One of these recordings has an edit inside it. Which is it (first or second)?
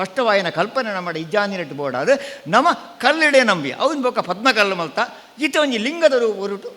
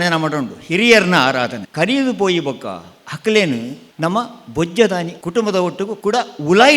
second